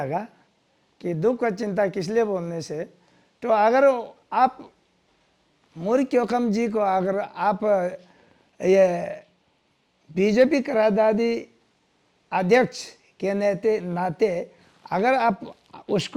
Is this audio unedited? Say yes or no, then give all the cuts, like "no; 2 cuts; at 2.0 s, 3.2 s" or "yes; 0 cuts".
yes; 0 cuts